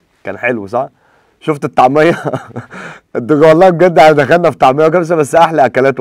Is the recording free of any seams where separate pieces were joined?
yes; 0 cuts

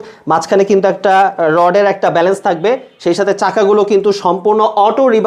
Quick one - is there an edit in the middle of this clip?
no; 0 cuts

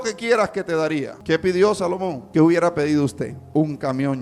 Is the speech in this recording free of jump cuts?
no; 3 cuts; at 1.1 s, 2.2 s, 3.4 s

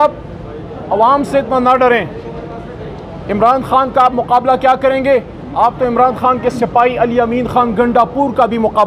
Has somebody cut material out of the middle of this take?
no; 0 cuts

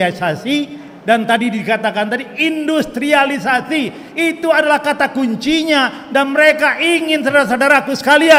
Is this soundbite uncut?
yes; 0 cuts

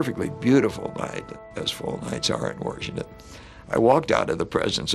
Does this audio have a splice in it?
yes; 1 cut; at 1.4 s

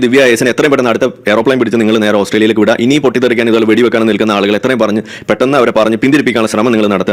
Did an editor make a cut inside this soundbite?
no; 0 cuts

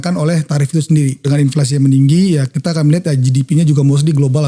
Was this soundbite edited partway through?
yes; 1 cut; at 1.2 s

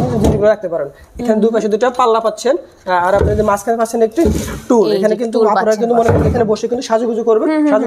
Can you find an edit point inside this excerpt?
no; 0 cuts

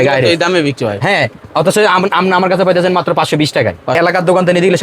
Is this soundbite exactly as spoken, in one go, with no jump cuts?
no; 1 cut; at 3.9 s

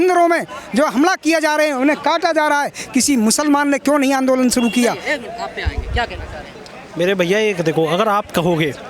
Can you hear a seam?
no; 0 cuts

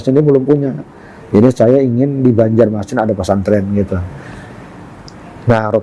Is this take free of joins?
yes; 0 cuts

